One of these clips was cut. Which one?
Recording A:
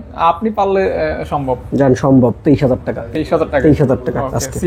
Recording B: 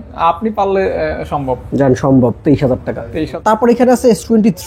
B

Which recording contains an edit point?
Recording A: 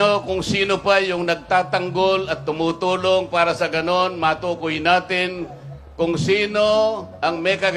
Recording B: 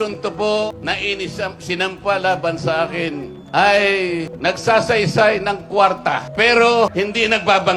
B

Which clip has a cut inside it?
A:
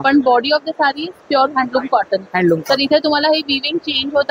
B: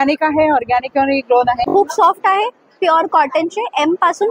B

